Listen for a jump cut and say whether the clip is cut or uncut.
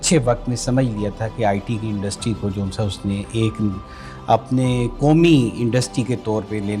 uncut